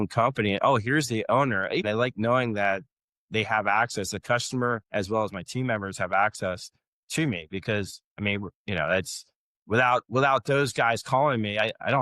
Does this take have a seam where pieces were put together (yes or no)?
yes